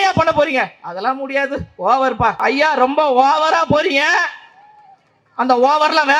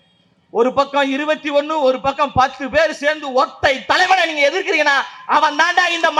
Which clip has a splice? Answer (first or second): first